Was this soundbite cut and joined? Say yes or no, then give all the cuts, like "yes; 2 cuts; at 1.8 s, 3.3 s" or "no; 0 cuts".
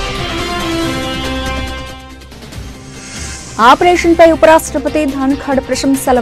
yes; 1 cut; at 3.5 s